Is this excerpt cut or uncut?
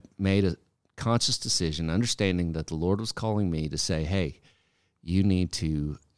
uncut